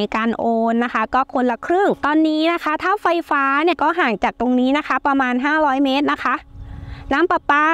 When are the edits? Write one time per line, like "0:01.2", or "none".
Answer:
0:02.0
0:03.8